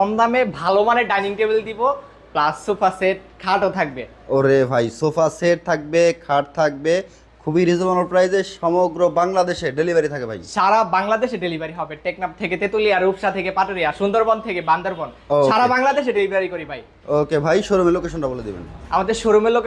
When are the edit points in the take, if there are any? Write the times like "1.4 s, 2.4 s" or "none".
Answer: none